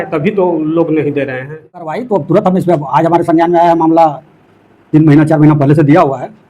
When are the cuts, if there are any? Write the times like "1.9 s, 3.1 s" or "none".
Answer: 1.9 s